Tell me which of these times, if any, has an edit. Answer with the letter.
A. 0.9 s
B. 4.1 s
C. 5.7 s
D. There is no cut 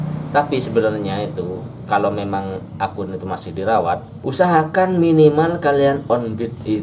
B